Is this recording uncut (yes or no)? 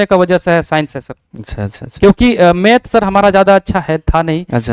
yes